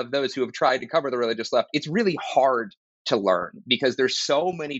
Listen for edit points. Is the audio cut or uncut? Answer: uncut